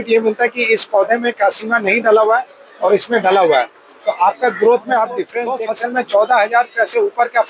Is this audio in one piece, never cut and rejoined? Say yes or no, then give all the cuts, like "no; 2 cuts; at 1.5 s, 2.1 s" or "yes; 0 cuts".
no; 1 cut; at 5.4 s